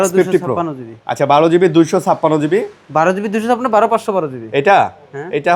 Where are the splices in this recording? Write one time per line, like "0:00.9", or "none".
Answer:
none